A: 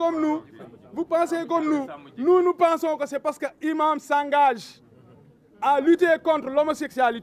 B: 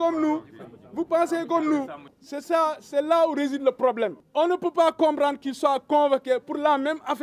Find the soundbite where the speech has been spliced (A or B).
B